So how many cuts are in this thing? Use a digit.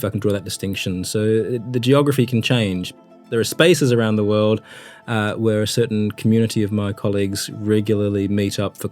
1